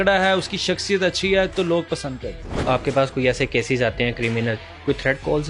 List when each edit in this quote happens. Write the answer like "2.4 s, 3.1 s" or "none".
2.6 s